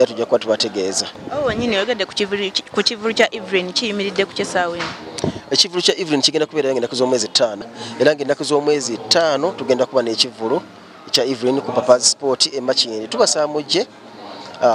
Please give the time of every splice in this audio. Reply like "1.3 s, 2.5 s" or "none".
1.1 s, 7.6 s